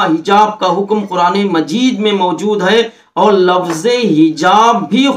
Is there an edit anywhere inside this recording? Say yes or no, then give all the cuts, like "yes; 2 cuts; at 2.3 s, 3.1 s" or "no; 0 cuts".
no; 0 cuts